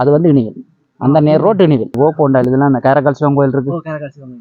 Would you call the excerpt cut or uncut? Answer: cut